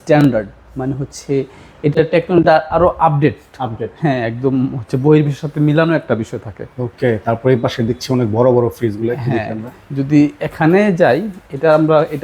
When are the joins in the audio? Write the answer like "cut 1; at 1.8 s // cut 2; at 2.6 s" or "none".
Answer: none